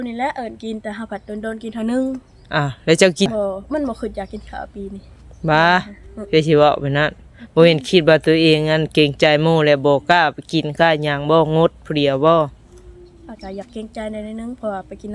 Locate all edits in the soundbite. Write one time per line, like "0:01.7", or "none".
0:03.3